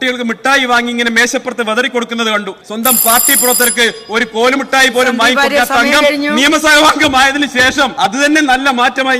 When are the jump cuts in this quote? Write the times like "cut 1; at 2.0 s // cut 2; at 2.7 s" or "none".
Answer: cut 1; at 2.6 s // cut 2; at 7.9 s